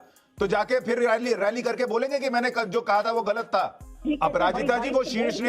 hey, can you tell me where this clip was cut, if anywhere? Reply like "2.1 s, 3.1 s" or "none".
3.9 s

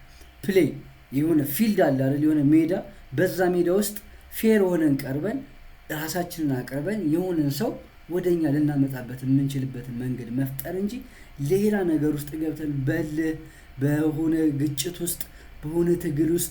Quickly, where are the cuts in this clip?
none

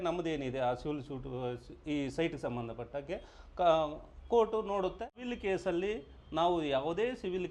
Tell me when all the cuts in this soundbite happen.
5.3 s

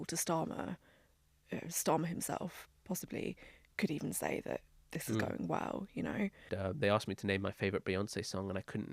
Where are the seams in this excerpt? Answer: 6.4 s

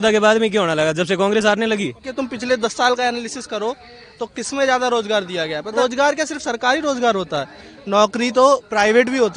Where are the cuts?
2.1 s, 5.7 s

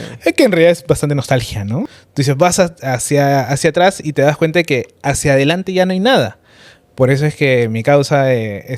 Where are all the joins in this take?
2.0 s

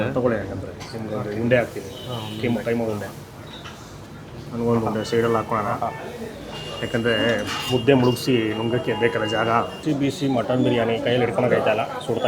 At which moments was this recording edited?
9.7 s

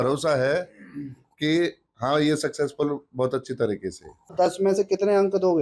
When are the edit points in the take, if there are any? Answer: 4.3 s

